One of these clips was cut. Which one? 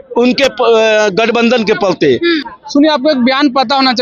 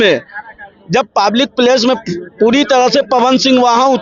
first; 1 cut; at 2.5 s

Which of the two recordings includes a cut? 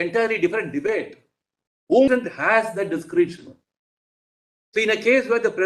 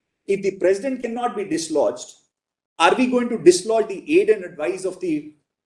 first; 1 cut; at 2.1 s

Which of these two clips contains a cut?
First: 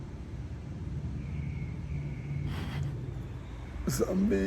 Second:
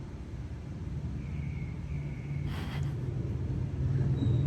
first; 1 cut; at 3.3 s

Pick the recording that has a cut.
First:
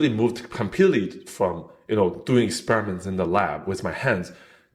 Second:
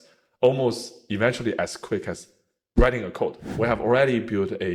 second; 1 cut; at 3.4 s

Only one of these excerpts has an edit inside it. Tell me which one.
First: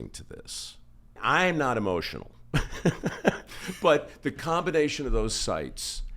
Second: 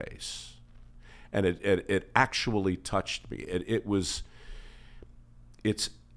first; 1 cut; at 1.2 s

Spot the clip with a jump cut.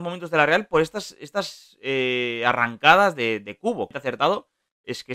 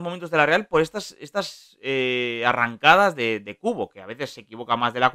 first; 1 cut; at 3.9 s

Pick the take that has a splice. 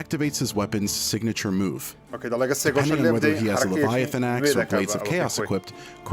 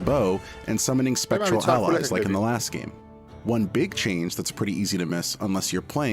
second; 2 cuts; at 2.1 s, 5.4 s

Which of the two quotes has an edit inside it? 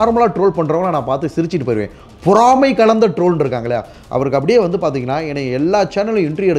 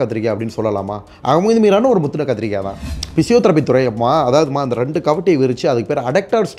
second; 1 cut; at 2.8 s

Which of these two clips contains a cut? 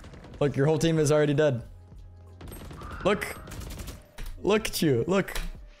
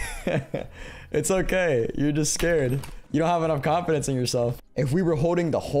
second; 2 cuts; at 2.9 s, 4.6 s

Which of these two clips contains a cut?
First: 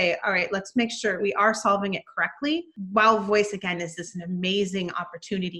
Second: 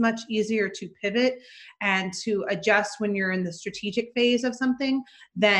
first; 2 cuts; at 1.2 s, 2.8 s

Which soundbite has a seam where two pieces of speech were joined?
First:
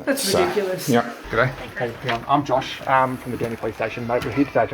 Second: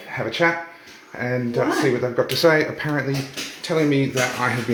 first; 1 cut; at 1.2 s

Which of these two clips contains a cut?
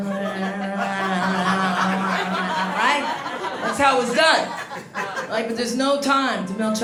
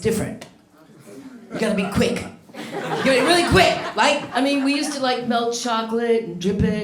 second; 1 cut; at 4.3 s

